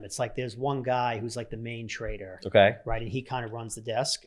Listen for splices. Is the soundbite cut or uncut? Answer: uncut